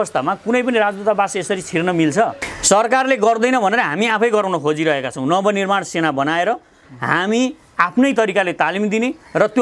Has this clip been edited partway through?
yes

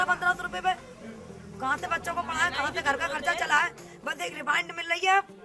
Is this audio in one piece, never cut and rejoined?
yes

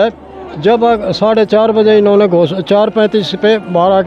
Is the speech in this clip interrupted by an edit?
no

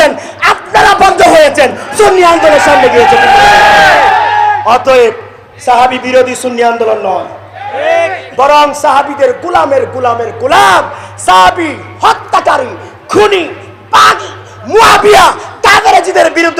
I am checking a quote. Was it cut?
no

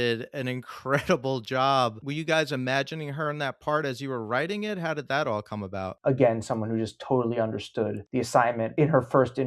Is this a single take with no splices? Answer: no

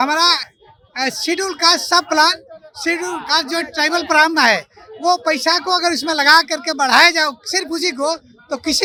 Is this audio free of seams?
yes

